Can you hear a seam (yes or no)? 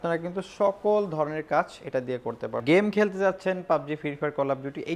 yes